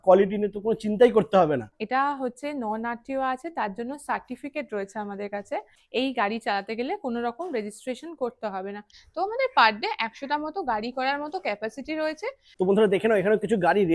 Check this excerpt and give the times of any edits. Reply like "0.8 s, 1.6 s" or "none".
1.8 s, 5.8 s, 9.0 s, 12.5 s